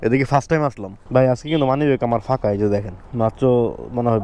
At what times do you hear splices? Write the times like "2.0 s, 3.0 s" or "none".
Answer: 0.9 s